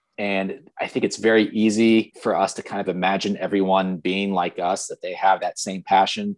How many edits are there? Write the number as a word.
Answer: one